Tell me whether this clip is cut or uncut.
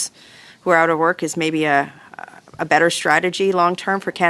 uncut